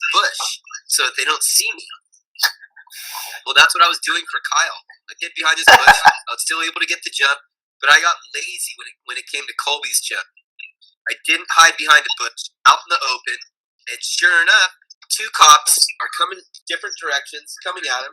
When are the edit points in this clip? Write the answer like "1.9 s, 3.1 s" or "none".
14.9 s, 16.5 s